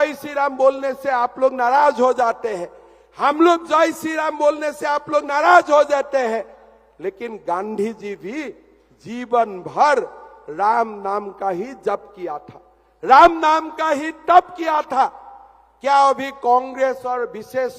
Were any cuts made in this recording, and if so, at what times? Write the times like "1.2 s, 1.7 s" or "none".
none